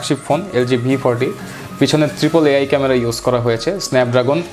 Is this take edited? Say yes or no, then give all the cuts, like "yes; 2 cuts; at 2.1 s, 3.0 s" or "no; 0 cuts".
no; 0 cuts